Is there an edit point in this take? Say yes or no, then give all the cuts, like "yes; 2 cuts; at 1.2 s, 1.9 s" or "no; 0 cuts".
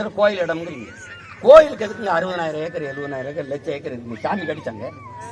no; 0 cuts